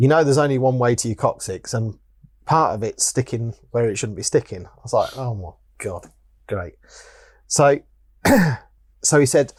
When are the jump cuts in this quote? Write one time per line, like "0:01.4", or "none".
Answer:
none

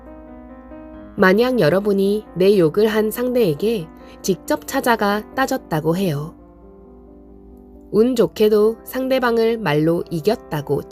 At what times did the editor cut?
0:01.1

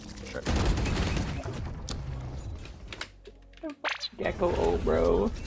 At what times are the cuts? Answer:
none

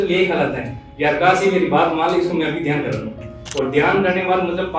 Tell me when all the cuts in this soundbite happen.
0:03.4

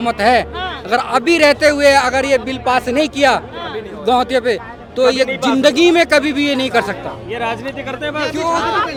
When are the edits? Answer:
none

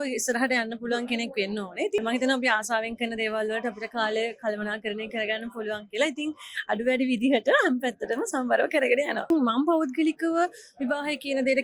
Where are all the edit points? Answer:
0:02.0
0:09.3

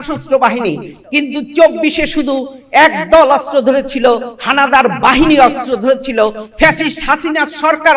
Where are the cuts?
0:00.9

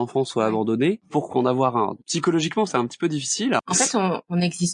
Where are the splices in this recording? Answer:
0:01.1
0:02.0
0:03.6

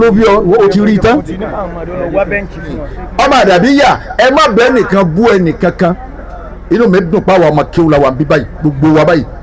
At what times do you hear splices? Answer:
0:03.0

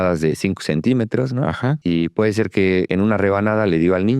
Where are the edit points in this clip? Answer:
0:01.8
0:02.9

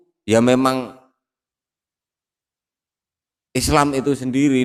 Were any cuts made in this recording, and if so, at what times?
none

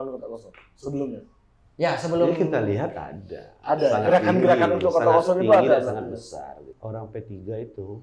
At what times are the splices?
0:06.7

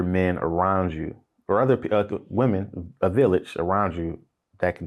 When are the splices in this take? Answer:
none

